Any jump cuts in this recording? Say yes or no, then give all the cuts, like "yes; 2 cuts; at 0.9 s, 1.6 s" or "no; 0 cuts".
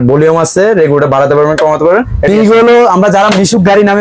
yes; 1 cut; at 2.3 s